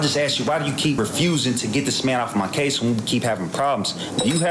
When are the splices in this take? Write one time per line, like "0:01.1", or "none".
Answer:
0:01.0